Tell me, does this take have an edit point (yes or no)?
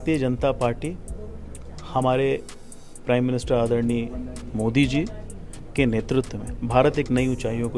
no